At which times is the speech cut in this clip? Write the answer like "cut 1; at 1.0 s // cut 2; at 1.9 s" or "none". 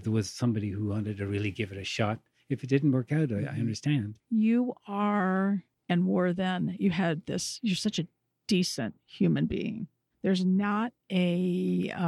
cut 1; at 4.2 s // cut 2; at 8.2 s // cut 3; at 11.0 s